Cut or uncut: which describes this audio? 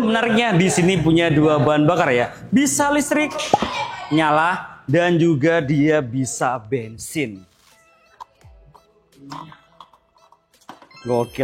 uncut